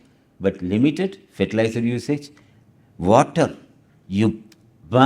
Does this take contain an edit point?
no; 0 cuts

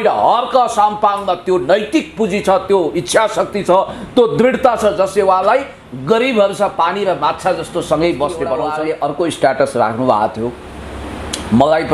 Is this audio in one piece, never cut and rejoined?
no; 1 cut; at 8.6 s

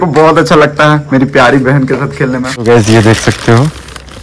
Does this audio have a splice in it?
yes; 1 cut; at 2.6 s

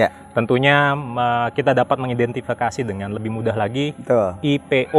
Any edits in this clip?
no; 0 cuts

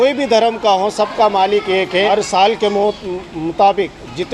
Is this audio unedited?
no; 1 cut; at 1.9 s

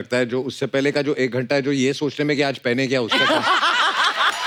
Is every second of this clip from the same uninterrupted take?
yes; 0 cuts

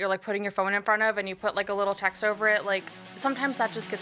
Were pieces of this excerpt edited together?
no; 0 cuts

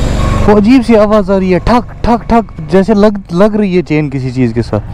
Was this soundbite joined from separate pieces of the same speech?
no; 0 cuts

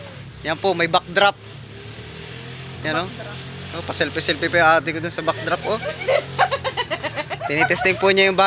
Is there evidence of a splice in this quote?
no; 0 cuts

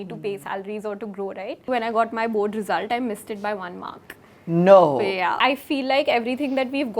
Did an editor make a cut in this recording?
yes; 2 cuts; at 1.7 s, 5.4 s

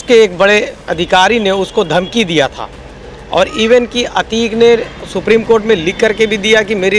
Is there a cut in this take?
no; 0 cuts

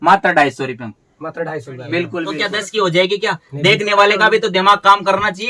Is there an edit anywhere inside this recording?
yes; 1 cut; at 2.5 s

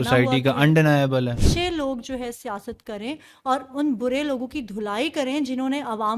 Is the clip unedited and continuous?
no; 1 cut; at 1.4 s

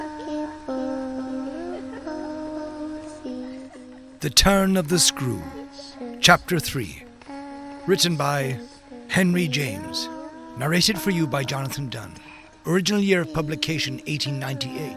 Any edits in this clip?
yes; 1 cut; at 3.8 s

